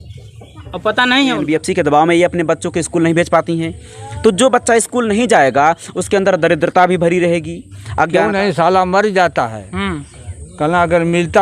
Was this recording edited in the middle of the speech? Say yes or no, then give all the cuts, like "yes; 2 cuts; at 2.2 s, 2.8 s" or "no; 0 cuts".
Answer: yes; 2 cuts; at 1.4 s, 8.2 s